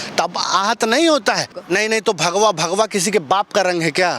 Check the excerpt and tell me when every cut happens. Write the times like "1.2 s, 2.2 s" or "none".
1.5 s